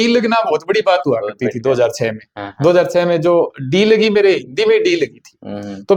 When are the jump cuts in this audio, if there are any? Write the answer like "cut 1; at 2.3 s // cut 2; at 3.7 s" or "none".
none